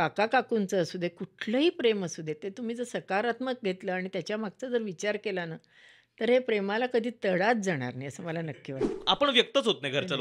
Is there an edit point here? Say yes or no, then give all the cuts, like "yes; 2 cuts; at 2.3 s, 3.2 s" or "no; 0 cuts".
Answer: yes; 1 cut; at 8.8 s